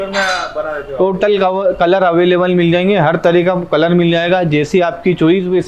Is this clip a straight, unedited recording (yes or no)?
yes